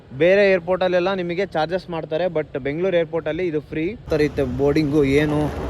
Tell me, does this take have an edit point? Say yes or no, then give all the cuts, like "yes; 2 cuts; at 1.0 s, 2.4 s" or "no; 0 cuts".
yes; 1 cut; at 4.0 s